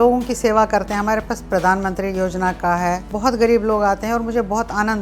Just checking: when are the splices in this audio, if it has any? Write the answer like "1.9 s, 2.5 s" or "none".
3.1 s